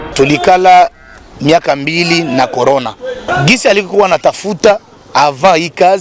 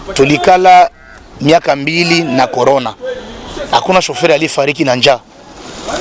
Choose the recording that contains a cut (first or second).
first